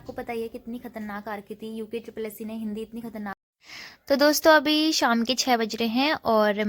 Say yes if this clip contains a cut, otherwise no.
yes